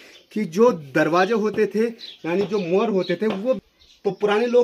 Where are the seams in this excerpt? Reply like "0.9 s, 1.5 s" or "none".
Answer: 3.7 s

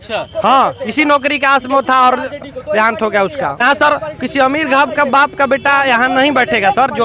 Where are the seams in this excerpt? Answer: 3.6 s

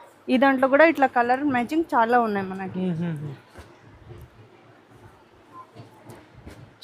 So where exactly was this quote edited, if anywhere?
none

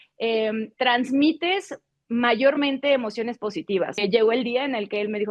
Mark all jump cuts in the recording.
4.0 s

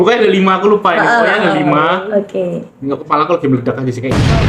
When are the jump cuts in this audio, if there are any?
none

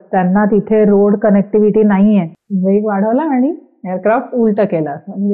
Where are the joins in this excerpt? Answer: 2.4 s

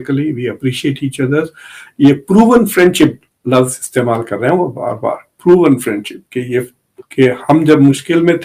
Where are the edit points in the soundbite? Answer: none

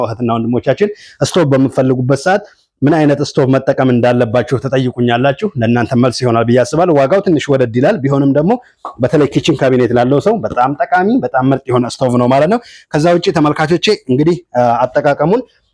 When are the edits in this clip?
none

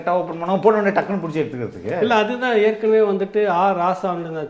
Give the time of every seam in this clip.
none

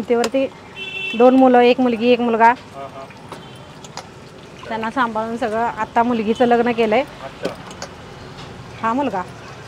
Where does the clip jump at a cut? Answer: none

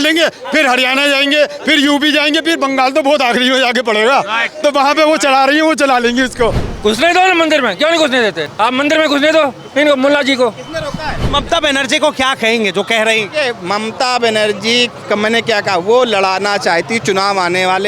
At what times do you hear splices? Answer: 6.6 s, 8.4 s, 11.3 s, 15.0 s

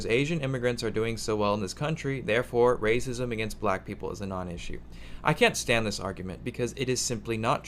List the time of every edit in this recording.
none

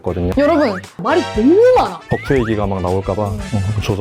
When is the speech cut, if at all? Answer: 2.0 s

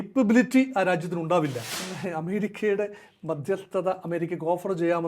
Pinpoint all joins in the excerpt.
1.7 s

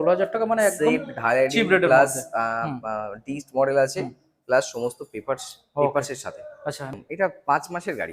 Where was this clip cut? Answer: 6.9 s

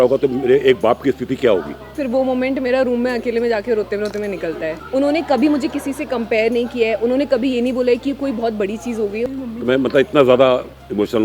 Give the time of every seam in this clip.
2.0 s, 4.8 s, 9.3 s

